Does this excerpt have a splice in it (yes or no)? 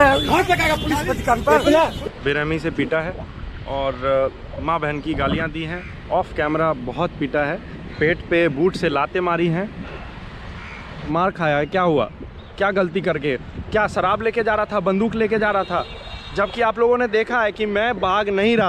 yes